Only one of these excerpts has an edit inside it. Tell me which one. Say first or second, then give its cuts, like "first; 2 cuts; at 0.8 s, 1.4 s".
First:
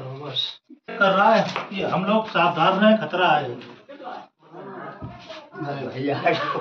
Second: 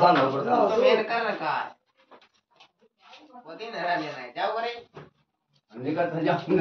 first; 1 cut; at 0.9 s